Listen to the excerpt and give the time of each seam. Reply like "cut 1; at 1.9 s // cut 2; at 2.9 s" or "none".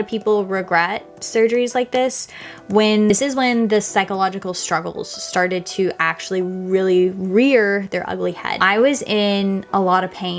cut 1; at 3.1 s // cut 2; at 8.5 s